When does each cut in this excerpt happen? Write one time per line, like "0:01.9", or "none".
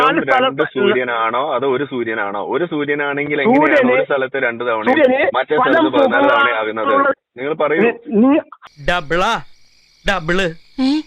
0:08.6